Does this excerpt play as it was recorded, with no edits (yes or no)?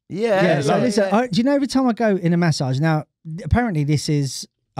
yes